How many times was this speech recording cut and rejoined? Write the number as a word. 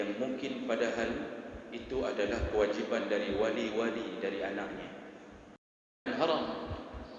one